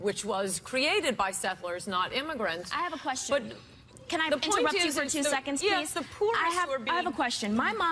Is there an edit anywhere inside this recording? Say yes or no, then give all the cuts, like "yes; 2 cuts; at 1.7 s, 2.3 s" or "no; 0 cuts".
yes; 1 cut; at 5.9 s